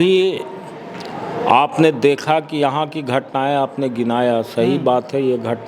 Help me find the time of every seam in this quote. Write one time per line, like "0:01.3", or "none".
none